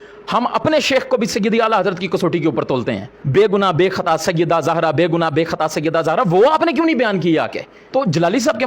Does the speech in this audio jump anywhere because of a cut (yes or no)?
yes